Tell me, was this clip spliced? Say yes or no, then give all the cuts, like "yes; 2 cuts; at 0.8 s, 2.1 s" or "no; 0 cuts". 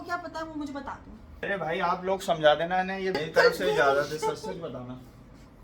yes; 2 cuts; at 1.3 s, 3.2 s